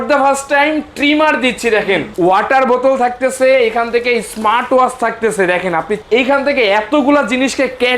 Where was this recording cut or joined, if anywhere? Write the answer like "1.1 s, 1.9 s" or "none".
2.1 s, 6.0 s